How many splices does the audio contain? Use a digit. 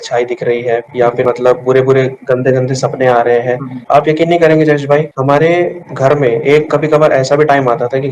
1